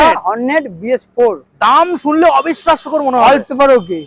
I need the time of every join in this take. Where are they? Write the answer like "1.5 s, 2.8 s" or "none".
none